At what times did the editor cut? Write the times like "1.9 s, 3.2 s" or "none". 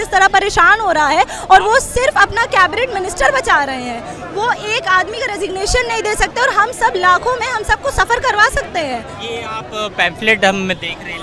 none